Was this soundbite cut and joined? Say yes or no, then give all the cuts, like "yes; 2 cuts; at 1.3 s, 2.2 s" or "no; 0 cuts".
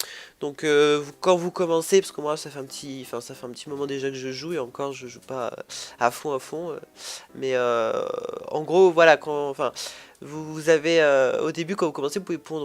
yes; 1 cut; at 10.2 s